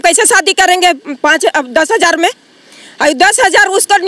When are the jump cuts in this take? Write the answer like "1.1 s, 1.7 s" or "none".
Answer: none